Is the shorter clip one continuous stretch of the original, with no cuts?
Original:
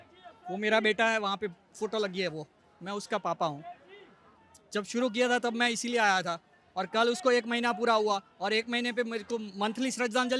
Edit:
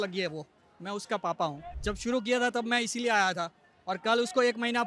no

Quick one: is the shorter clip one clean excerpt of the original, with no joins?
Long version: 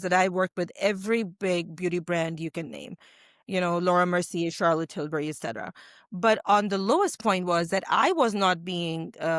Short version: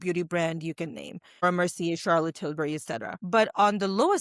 no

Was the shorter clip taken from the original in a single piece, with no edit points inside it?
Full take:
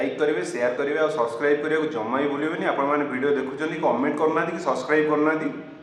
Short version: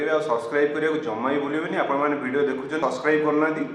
no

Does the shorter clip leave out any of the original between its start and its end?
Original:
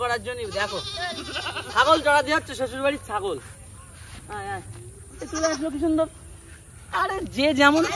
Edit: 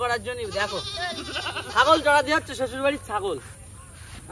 no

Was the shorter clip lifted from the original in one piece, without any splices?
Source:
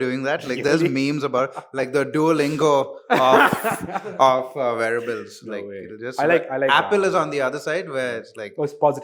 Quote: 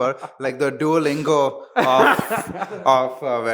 yes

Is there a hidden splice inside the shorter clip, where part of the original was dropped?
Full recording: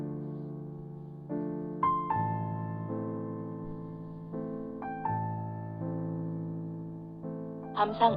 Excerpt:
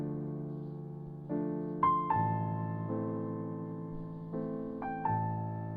no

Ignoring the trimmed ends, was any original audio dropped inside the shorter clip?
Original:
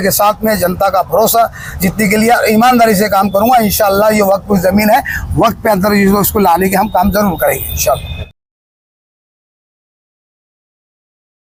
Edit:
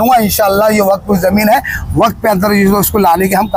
no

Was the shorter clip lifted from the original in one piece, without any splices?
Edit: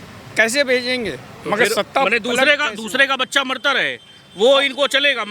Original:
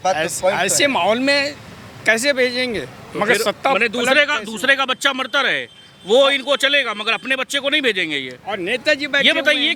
yes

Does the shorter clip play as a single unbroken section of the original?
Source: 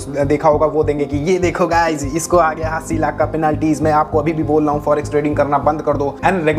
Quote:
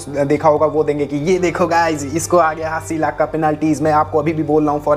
yes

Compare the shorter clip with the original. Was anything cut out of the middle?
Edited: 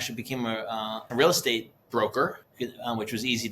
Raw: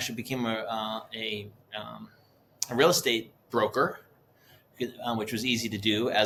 yes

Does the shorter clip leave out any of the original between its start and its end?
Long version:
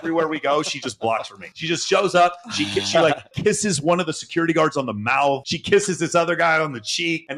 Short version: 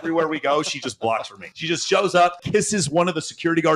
yes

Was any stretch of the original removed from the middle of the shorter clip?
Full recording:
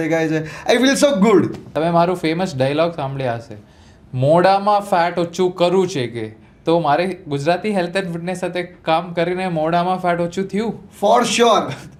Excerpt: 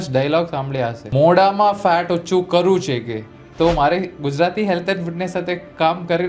yes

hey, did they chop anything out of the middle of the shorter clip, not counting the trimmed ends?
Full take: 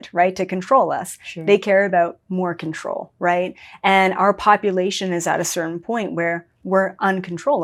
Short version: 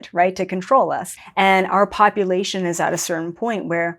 yes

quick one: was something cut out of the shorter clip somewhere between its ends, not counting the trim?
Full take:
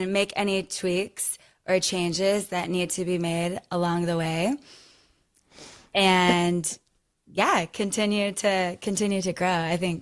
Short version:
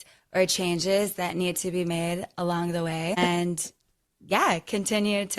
yes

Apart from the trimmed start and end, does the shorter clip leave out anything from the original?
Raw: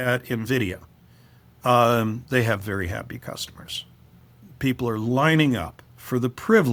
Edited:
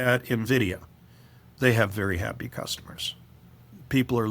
yes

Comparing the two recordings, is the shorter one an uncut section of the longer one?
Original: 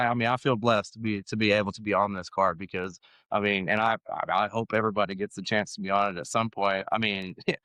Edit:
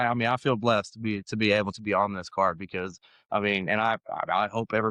yes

